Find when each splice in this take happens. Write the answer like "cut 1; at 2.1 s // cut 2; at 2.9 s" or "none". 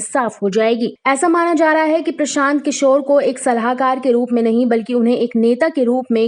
cut 1; at 1.0 s